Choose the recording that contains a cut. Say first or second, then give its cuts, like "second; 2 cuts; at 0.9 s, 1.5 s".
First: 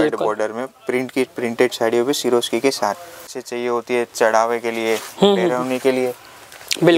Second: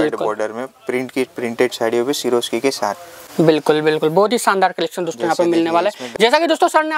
first; 1 cut; at 3.2 s